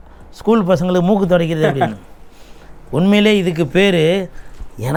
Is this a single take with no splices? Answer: yes; 0 cuts

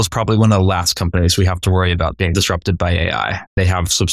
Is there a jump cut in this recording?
no; 0 cuts

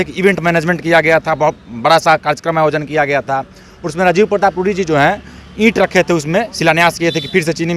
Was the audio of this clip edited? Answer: no; 0 cuts

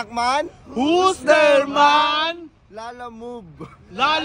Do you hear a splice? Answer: no; 0 cuts

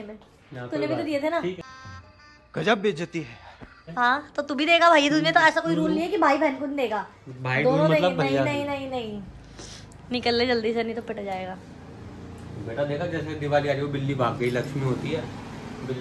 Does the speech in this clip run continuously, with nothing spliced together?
yes; 0 cuts

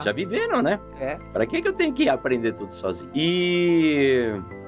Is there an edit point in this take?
yes; 1 cut; at 3.0 s

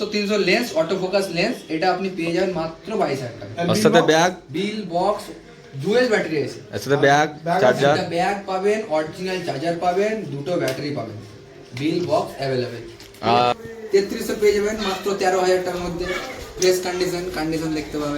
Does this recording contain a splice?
yes; 1 cut; at 13.6 s

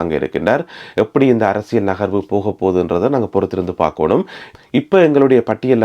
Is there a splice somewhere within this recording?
yes; 1 cut; at 4.4 s

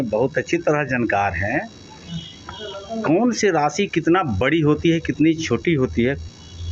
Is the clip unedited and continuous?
yes; 0 cuts

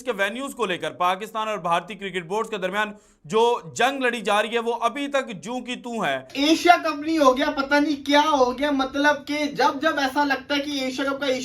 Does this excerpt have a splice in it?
yes; 1 cut; at 6.2 s

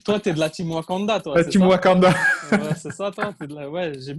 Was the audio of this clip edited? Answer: no; 0 cuts

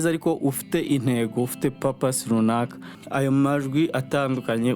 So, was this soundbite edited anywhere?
yes; 1 cut; at 3.0 s

